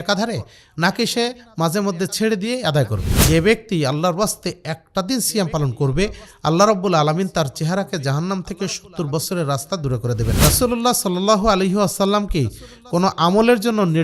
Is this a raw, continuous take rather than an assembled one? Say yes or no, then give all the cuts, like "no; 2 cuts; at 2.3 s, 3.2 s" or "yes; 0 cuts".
no; 2 cuts; at 3.1 s, 10.4 s